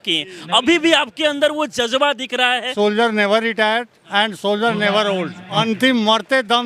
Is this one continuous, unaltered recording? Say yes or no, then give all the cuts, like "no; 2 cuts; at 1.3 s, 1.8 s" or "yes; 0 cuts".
no; 2 cuts; at 2.7 s, 5.6 s